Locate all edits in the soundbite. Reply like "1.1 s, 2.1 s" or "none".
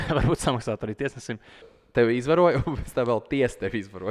1.8 s